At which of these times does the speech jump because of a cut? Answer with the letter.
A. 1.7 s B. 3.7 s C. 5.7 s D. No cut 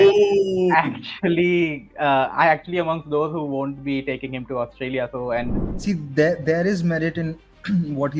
C